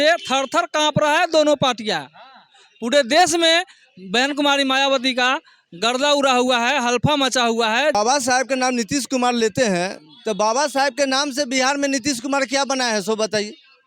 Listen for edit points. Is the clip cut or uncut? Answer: cut